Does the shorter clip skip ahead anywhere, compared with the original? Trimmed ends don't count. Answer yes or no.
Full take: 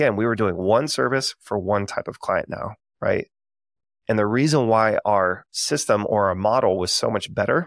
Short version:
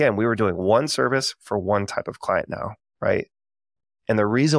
no